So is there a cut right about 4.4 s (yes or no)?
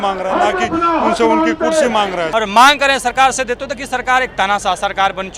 no